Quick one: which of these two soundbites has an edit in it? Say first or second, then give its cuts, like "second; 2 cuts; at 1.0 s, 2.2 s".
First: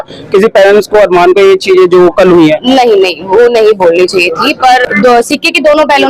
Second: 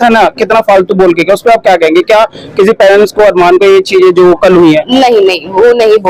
first; 1 cut; at 4.8 s